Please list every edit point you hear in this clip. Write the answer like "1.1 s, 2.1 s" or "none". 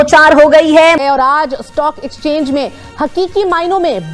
1.0 s